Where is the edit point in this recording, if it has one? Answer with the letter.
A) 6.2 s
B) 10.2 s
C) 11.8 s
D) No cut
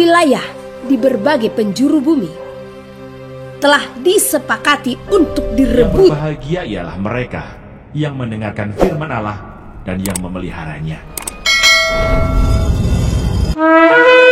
A